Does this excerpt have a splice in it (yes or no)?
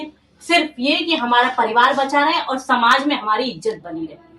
no